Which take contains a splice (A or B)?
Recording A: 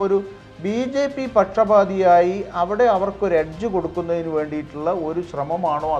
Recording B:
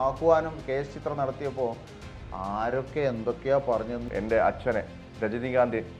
B